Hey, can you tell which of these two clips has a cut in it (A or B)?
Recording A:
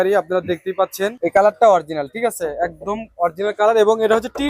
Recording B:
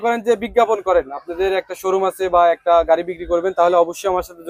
A